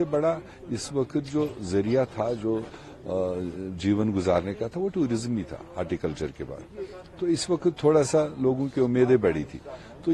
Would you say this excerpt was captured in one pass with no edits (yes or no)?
yes